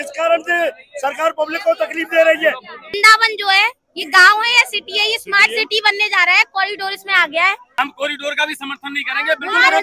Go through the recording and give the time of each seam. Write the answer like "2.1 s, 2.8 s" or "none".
2.9 s, 7.6 s